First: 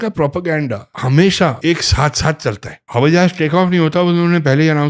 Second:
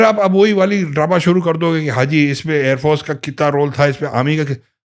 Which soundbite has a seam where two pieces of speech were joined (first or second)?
first